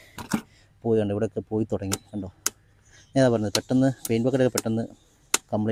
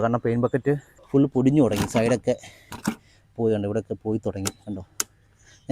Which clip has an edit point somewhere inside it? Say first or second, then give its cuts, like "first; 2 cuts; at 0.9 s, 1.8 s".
second; 1 cut; at 0.9 s